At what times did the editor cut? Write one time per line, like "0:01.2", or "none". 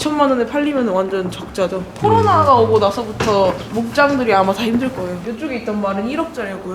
0:01.9
0:05.2